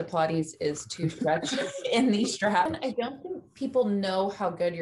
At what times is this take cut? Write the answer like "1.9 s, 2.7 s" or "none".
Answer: 2.7 s